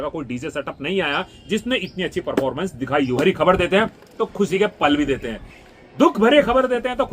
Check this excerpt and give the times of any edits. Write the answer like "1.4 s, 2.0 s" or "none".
3.2 s